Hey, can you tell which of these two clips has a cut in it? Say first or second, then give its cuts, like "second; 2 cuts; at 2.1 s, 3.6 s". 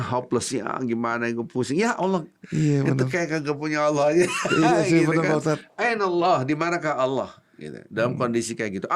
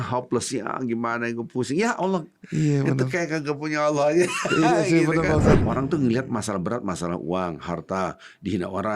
second; 1 cut; at 5.6 s